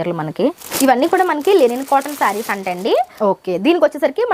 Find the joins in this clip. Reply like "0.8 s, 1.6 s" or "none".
0.7 s, 3.1 s